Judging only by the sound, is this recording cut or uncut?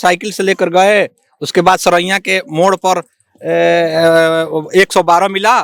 uncut